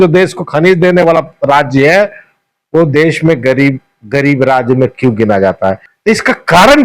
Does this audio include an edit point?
yes; 1 cut; at 5.9 s

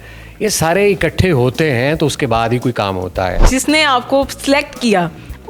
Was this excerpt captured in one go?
no; 1 cut; at 3.4 s

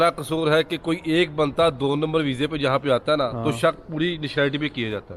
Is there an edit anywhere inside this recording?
no; 0 cuts

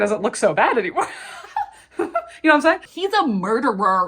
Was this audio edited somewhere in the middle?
yes; 1 cut; at 2.9 s

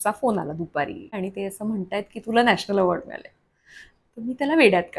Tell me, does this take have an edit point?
yes; 1 cut; at 1.1 s

